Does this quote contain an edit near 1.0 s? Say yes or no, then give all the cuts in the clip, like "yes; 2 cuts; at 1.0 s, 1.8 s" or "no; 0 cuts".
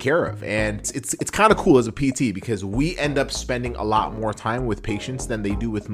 yes; 1 cut; at 1.0 s